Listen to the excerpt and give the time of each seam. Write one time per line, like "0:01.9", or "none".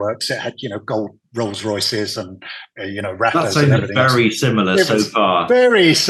none